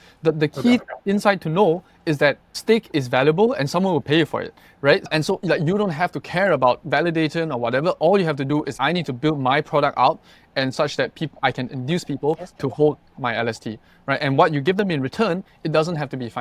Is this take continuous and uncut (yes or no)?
no